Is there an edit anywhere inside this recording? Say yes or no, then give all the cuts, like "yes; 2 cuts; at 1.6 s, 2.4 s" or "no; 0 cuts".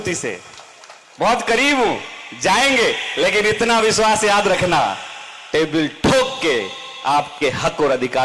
no; 0 cuts